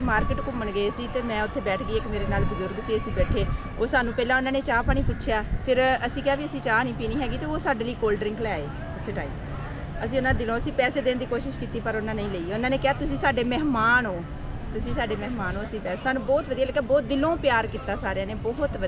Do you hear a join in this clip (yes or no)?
no